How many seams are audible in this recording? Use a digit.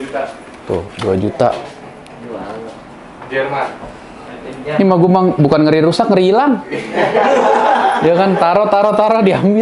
0